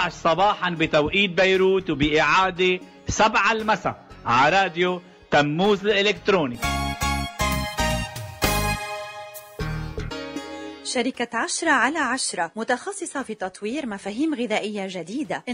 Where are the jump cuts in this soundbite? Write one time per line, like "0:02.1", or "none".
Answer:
0:09.5
0:10.7